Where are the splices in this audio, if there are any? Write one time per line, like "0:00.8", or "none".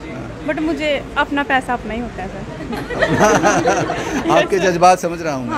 none